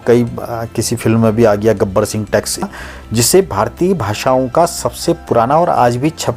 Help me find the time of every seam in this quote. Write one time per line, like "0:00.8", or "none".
0:02.7